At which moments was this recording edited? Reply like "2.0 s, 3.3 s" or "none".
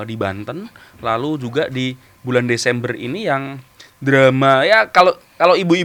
none